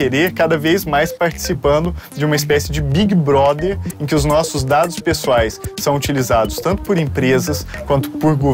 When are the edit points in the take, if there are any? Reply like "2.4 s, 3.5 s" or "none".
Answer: none